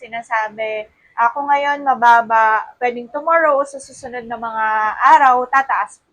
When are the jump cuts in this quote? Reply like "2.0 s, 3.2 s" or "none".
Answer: none